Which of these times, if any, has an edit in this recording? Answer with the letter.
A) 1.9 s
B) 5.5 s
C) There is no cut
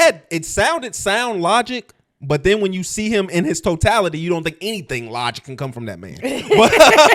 C